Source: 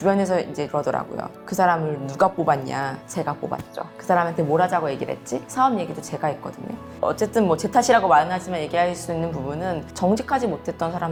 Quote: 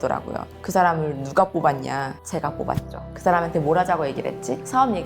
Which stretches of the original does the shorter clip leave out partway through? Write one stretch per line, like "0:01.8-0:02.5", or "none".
none